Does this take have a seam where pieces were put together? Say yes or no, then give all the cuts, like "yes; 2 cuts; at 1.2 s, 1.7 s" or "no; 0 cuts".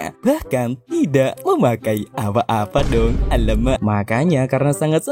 yes; 1 cut; at 3.8 s